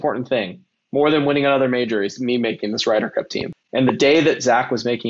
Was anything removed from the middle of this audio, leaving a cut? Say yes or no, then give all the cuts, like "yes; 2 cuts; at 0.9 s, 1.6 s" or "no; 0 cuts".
yes; 1 cut; at 3.4 s